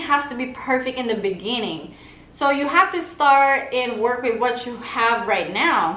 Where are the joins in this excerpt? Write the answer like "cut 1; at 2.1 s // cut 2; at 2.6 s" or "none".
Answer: none